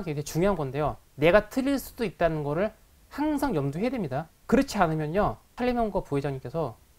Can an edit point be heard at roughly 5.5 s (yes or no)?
yes